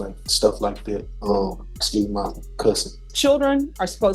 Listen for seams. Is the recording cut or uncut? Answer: cut